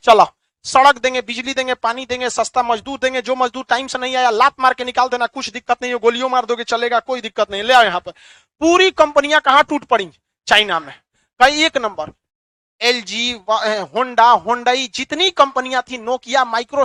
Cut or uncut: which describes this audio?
uncut